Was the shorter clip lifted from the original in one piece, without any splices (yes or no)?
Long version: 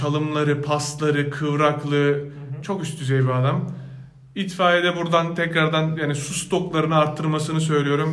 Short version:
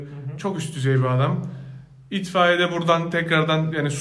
yes